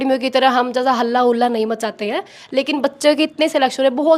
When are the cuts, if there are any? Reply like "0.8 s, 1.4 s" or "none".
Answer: none